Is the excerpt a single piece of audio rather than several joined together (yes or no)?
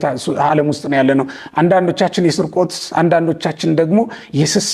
yes